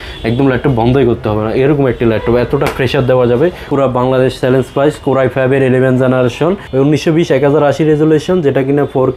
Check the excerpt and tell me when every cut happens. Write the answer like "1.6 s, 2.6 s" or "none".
3.7 s, 6.6 s